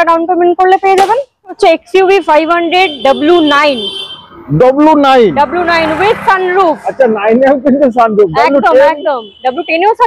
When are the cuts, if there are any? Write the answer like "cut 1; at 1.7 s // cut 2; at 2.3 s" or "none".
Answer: cut 1; at 1.6 s